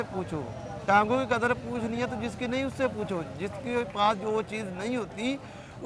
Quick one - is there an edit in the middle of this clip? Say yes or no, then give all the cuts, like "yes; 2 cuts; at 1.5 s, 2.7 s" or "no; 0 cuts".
no; 0 cuts